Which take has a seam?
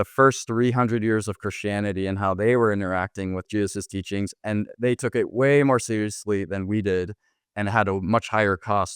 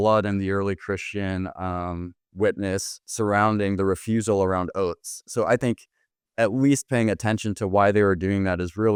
first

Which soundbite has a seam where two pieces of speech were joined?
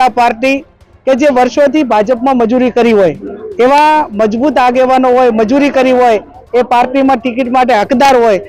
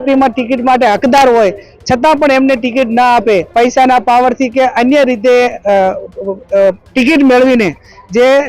second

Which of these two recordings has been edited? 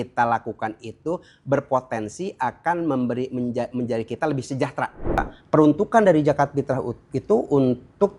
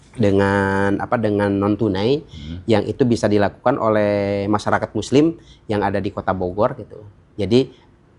first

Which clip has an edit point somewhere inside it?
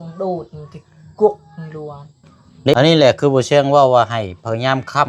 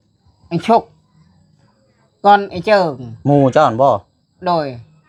first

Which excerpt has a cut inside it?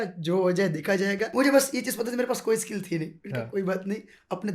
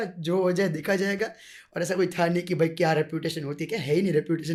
first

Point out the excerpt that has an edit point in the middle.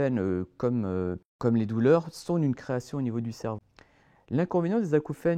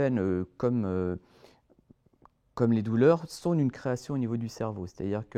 first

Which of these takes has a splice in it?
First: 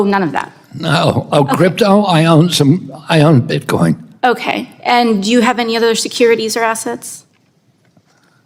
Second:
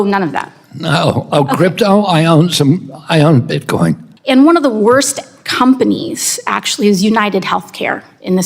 second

